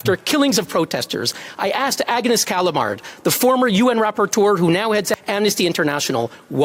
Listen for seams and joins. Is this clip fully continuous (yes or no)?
yes